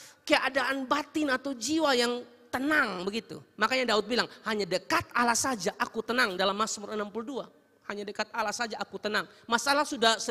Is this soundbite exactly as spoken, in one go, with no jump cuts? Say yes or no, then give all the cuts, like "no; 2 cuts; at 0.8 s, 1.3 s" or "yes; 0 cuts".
yes; 0 cuts